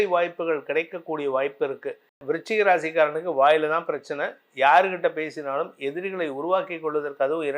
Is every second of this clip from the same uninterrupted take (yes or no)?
no